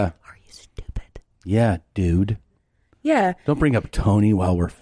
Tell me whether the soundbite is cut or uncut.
uncut